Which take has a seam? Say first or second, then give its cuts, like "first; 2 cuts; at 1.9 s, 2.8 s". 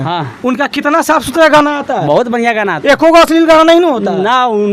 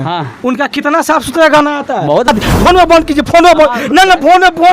second; 1 cut; at 2.3 s